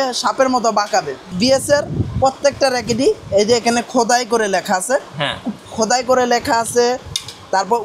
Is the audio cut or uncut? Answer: cut